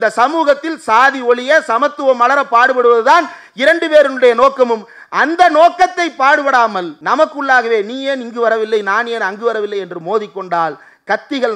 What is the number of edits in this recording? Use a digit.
1